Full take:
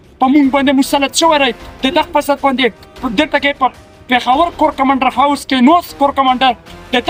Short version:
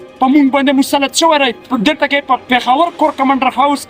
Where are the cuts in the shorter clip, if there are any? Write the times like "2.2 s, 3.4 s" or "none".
1.6 s, 2.4 s